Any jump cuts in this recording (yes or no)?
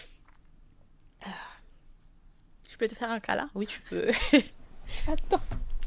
no